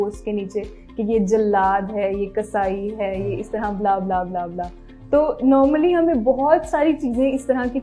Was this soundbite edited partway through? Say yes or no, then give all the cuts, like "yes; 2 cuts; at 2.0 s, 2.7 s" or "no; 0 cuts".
no; 0 cuts